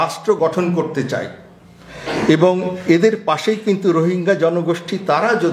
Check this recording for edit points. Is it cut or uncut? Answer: uncut